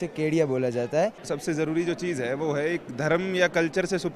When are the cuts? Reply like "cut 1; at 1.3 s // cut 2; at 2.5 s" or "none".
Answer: cut 1; at 1.2 s